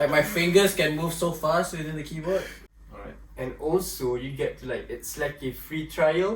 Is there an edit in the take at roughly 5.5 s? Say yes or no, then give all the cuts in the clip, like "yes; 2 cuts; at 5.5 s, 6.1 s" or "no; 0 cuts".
no; 1 cut; at 2.6 s